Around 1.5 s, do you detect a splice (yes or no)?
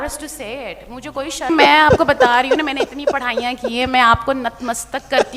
yes